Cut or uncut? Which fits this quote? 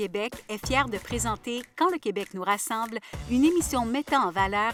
uncut